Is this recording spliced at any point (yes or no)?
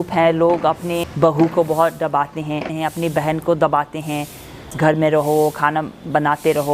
yes